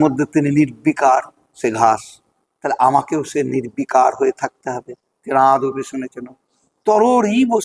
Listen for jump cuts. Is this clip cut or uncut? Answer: uncut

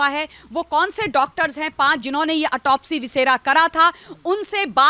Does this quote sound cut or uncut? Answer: uncut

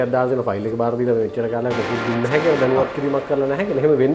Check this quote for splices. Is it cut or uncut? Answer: uncut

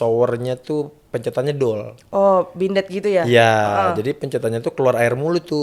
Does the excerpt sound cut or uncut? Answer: uncut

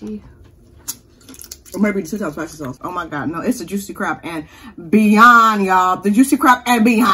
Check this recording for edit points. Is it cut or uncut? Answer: cut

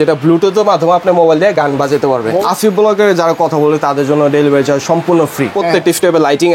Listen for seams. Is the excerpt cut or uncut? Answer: cut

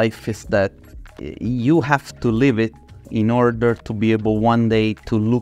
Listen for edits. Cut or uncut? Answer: uncut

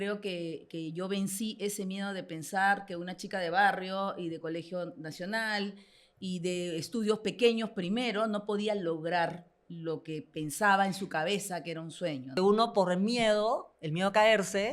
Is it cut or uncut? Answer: cut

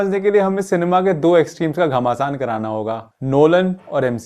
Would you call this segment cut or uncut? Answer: uncut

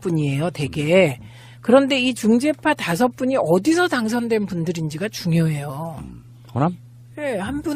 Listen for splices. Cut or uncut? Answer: cut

